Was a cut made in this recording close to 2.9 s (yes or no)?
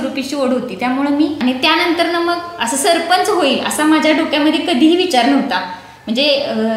no